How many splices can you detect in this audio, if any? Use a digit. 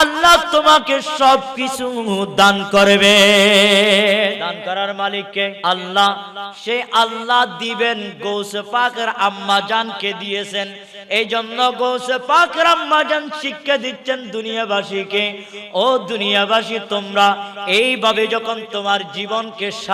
2